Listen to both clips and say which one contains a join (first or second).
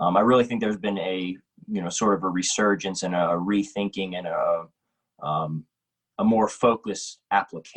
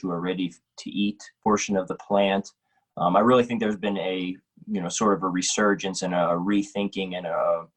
second